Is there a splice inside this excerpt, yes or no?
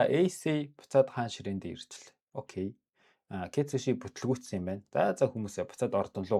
no